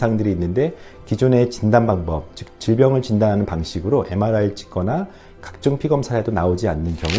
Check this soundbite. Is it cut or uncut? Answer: uncut